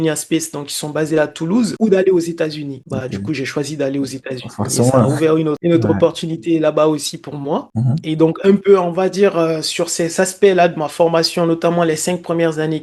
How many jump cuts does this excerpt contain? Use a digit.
0